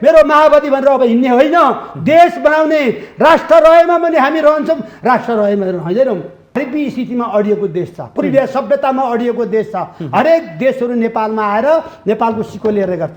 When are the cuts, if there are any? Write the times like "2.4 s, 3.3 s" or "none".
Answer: 6.6 s